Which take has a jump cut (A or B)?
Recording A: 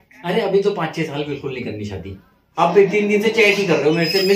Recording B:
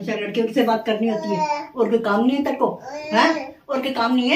A